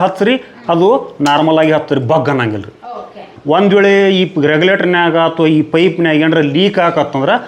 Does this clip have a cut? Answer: yes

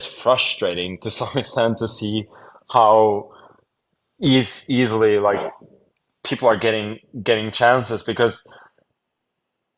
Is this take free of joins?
yes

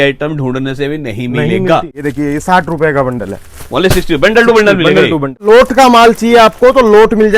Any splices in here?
yes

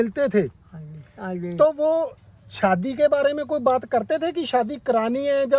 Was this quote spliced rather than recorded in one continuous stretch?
no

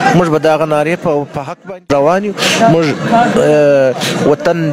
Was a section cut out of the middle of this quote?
yes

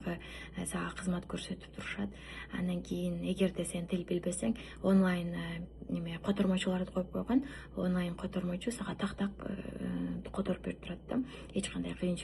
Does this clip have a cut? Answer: no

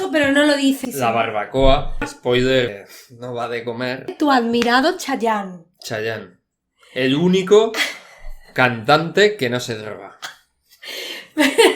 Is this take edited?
yes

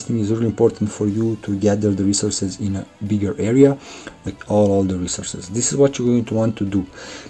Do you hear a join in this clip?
yes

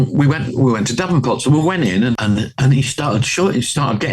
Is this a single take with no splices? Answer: no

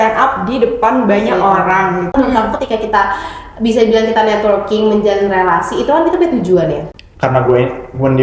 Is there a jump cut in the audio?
yes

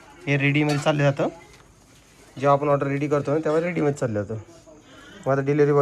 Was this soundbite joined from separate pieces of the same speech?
no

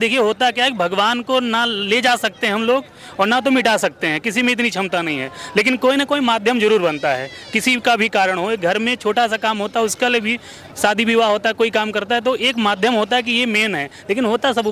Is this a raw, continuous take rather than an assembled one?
yes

